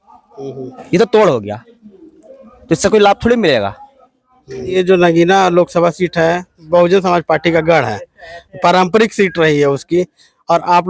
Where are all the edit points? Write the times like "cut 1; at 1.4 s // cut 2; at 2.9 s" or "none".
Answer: cut 1; at 4.7 s